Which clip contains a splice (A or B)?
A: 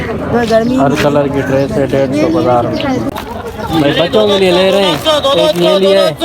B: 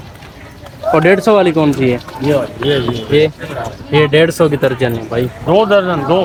A